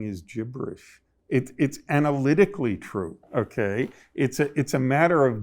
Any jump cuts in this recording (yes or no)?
yes